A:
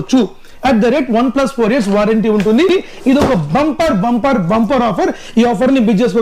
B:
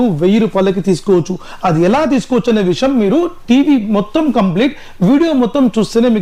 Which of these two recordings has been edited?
A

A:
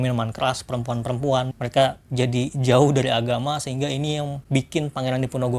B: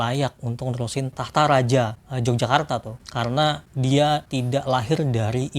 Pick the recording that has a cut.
A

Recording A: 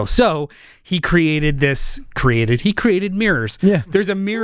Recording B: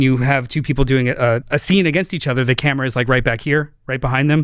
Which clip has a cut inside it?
B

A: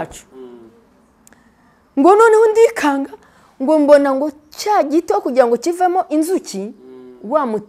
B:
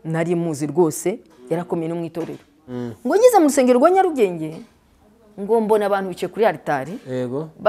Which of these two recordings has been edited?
B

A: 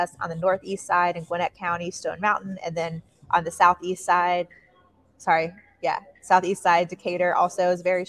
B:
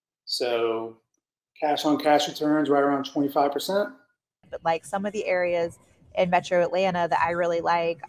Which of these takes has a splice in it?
B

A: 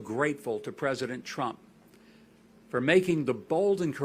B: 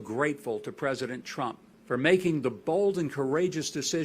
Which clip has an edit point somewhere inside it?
B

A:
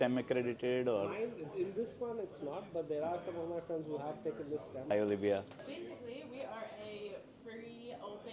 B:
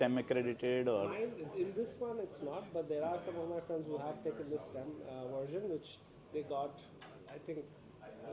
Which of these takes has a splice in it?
A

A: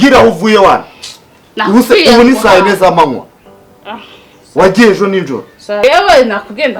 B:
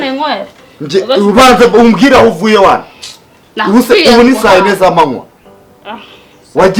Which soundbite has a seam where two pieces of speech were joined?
A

